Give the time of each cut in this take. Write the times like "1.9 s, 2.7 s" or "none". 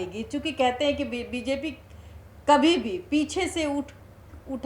none